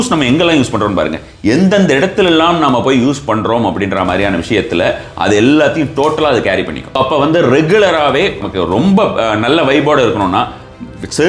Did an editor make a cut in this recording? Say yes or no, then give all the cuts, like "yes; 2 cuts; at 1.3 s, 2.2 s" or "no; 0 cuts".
yes; 2 cuts; at 7.0 s, 8.4 s